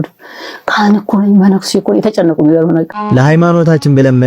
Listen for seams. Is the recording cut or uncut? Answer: cut